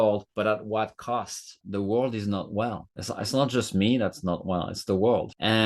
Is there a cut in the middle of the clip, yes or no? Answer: yes